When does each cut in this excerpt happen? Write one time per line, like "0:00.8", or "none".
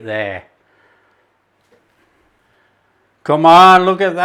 0:02.4